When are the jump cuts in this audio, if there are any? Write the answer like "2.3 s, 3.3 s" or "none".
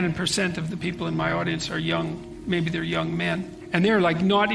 3.6 s